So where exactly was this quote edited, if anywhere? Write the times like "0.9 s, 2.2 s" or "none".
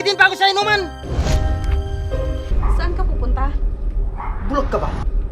1.0 s, 2.5 s